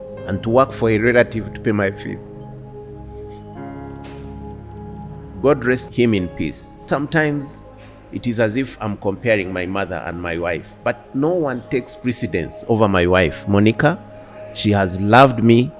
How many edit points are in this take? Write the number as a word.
one